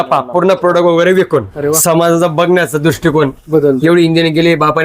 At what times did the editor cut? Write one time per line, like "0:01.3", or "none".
0:01.8

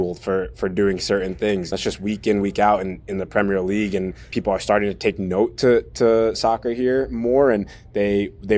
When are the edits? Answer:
0:01.7
0:04.3

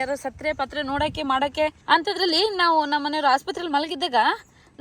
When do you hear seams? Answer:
0:01.8

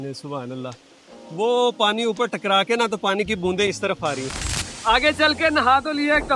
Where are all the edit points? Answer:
0:04.8

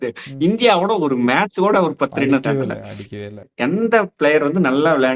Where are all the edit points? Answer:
0:03.5

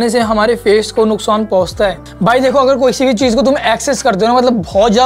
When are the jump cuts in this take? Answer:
none

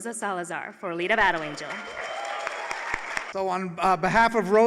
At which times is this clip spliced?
0:03.3

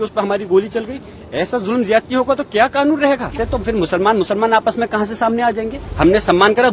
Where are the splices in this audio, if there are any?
0:03.4
0:05.8

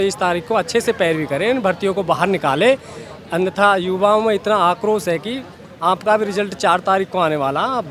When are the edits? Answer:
none

